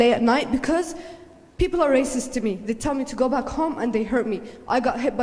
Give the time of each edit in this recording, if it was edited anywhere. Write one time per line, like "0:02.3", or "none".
none